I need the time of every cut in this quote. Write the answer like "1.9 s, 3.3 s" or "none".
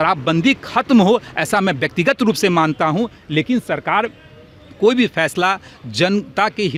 none